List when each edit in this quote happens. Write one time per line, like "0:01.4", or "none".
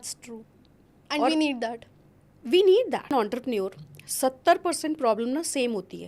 0:03.1